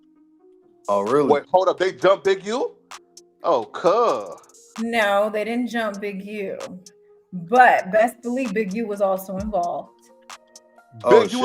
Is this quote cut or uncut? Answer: cut